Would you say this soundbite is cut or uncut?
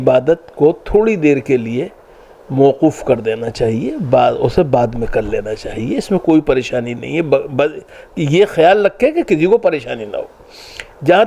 uncut